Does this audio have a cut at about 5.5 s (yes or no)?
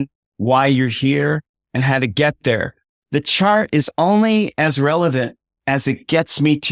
no